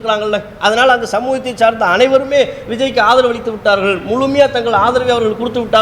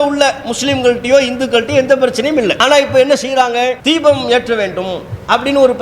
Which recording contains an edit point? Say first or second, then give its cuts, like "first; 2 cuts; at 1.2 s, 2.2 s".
second; 2 cuts; at 2.6 s, 3.8 s